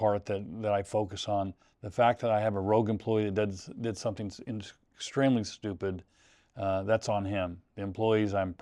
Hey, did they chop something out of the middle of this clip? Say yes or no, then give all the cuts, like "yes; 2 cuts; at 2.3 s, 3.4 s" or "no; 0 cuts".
no; 0 cuts